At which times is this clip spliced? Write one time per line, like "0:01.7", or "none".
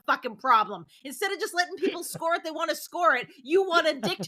none